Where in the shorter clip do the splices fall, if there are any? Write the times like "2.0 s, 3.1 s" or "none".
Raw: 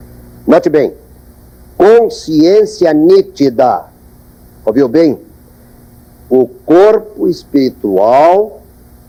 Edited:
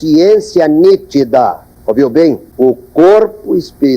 1.7 s, 2.5 s